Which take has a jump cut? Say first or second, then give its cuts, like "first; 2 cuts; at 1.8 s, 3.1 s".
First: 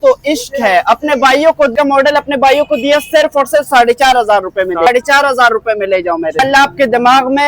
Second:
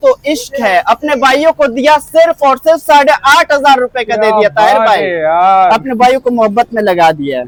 first; 3 cuts; at 1.7 s, 4.9 s, 6.4 s